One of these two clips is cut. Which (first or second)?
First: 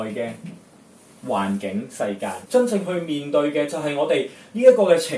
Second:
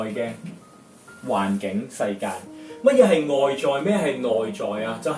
first